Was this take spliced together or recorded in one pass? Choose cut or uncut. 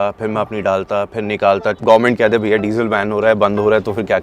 cut